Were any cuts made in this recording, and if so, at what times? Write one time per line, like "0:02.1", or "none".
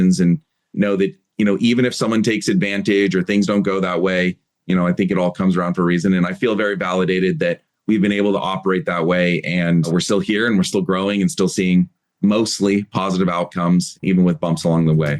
0:14.0